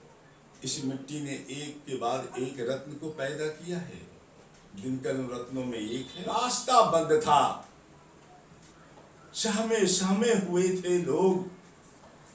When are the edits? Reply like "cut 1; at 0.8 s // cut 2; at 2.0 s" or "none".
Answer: cut 1; at 6.4 s